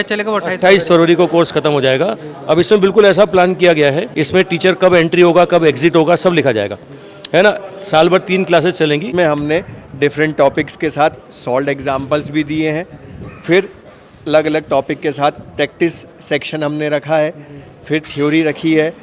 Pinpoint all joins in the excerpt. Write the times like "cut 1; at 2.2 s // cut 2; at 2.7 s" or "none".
cut 1; at 4.1 s // cut 2; at 9.1 s